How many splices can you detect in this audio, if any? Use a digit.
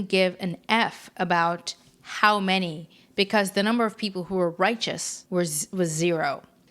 1